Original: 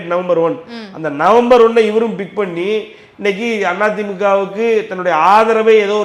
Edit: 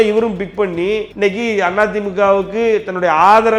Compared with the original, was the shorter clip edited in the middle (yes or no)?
yes